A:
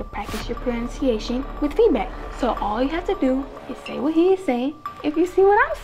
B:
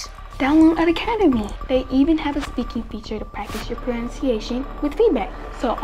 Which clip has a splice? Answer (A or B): B